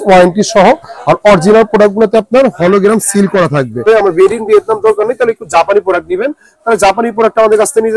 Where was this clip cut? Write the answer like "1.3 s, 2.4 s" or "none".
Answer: 3.9 s